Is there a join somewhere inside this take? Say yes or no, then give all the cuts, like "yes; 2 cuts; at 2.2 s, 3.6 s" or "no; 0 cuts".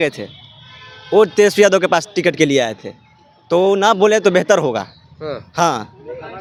no; 0 cuts